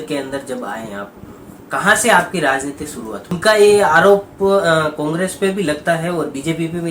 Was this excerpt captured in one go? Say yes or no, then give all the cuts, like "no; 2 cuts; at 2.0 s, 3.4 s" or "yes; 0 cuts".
no; 1 cut; at 3.4 s